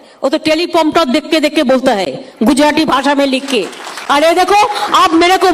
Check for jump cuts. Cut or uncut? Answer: uncut